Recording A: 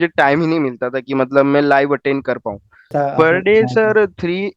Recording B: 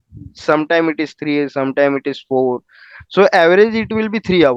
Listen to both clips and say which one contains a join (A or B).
A